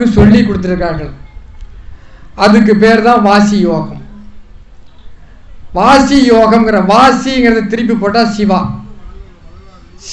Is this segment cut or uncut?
uncut